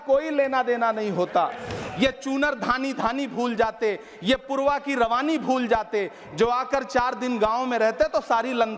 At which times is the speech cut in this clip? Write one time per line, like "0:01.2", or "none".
0:01.8

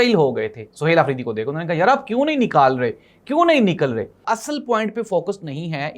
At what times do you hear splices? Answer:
0:04.3

